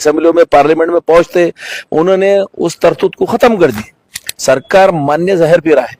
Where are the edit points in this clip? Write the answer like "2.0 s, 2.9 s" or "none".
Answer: 4.3 s